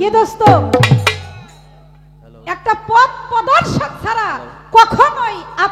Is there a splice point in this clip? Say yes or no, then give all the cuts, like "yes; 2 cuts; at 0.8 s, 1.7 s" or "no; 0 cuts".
no; 0 cuts